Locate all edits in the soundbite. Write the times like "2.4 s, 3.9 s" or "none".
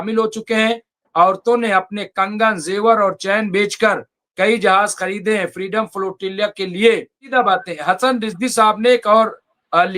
7.3 s